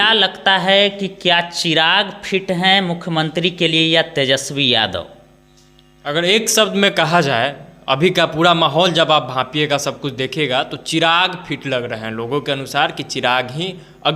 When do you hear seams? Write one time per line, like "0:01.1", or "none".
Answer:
none